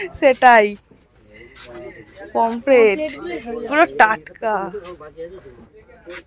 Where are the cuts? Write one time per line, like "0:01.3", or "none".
none